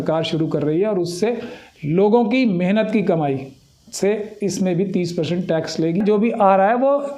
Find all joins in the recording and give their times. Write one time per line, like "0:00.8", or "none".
0:06.0